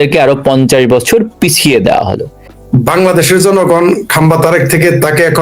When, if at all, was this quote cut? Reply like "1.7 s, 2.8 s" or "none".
2.4 s